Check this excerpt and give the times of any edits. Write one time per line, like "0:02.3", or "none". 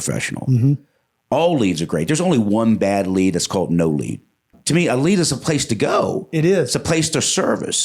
0:04.5